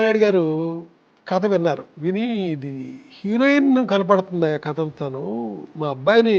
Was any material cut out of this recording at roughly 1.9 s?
yes; 1 cut; at 1.9 s

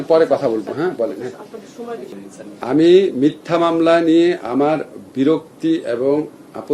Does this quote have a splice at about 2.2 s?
yes; 1 cut; at 2.2 s

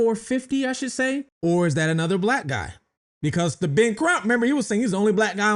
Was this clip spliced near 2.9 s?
no; 1 cut; at 1.3 s

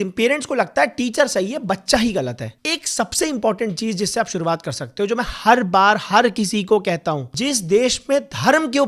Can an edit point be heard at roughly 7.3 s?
yes; 2 cuts; at 2.4 s, 7.3 s

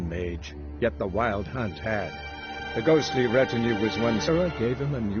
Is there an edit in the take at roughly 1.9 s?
no; 1 cut; at 4.3 s

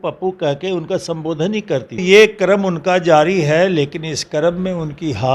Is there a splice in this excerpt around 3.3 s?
no; 1 cut; at 2.0 s

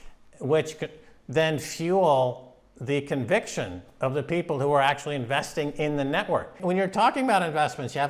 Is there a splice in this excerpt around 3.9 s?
no; 1 cut; at 6.5 s

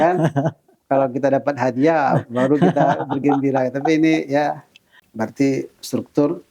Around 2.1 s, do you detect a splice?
no; 1 cut; at 5.0 s

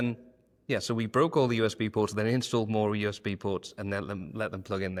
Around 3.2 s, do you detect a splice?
no; 0 cuts

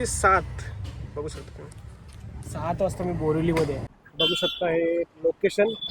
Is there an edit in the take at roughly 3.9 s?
yes; 1 cut; at 3.9 s

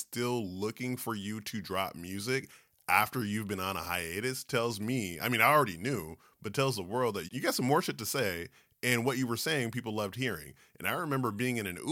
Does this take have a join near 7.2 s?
yes; 1 cut; at 7.2 s

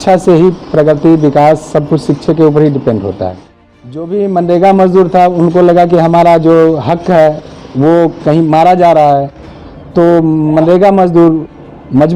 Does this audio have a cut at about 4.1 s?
yes; 1 cut; at 4.1 s

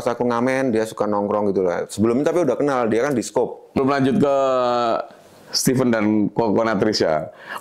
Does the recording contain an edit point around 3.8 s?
yes; 1 cut; at 3.8 s

